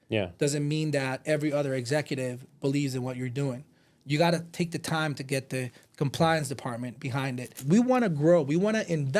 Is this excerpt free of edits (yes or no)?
no